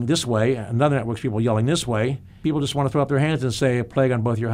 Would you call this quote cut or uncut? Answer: cut